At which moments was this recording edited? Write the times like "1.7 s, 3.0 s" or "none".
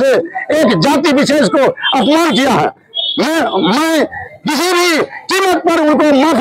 none